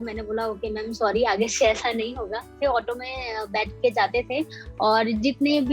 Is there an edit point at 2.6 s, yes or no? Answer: yes